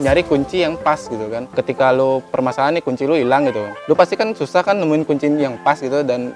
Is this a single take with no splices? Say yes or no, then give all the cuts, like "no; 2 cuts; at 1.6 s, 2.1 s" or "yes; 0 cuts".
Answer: no; 2 cuts; at 3.7 s, 5.1 s